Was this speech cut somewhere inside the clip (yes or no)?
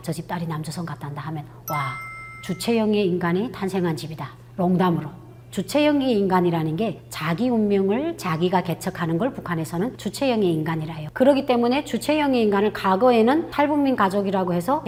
no